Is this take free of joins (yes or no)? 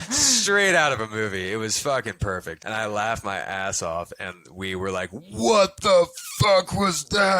no